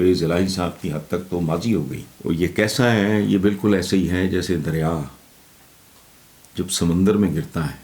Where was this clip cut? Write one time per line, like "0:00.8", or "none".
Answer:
0:02.0